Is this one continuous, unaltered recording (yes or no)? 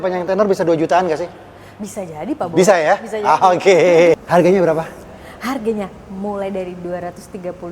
no